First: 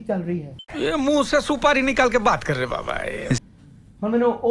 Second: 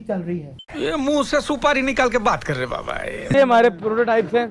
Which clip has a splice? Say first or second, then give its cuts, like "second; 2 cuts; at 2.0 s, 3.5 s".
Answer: second; 1 cut; at 3.3 s